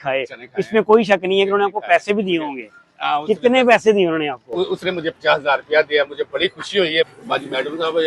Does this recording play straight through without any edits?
no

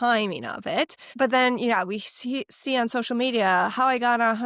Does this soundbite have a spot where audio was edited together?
yes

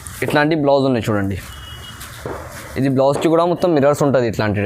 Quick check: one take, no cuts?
yes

